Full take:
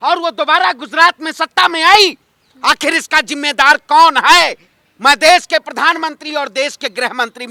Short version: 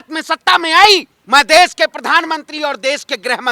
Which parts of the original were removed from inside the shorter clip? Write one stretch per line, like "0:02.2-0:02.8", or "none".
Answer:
0:02.2-0:04.9